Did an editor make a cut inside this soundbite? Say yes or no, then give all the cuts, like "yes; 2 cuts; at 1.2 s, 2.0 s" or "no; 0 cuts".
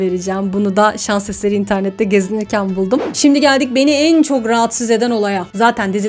yes; 1 cut; at 3.1 s